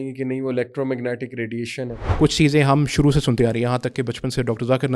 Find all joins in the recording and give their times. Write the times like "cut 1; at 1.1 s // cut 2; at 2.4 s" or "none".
cut 1; at 2.0 s